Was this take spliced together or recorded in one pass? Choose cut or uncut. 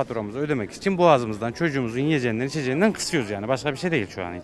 uncut